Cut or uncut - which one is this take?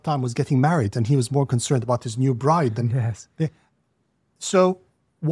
uncut